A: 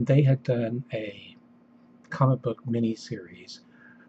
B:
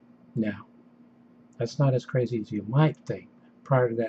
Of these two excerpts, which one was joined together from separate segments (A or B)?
B